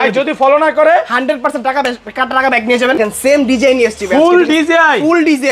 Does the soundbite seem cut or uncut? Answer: cut